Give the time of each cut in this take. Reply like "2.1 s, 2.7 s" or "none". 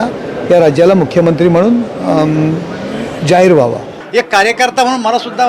3.9 s